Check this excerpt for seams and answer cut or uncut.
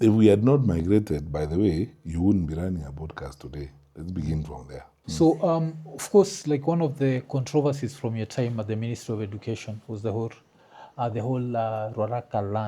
cut